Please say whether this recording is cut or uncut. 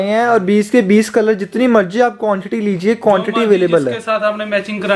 uncut